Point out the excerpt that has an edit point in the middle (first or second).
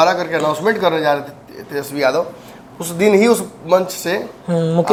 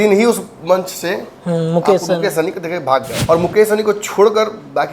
second